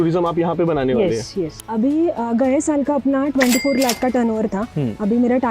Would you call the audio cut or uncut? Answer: cut